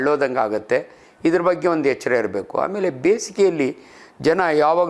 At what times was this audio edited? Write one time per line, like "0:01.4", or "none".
none